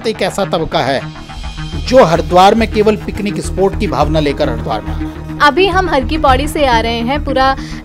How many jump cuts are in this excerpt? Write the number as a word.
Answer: one